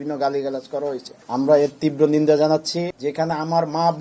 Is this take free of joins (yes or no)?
no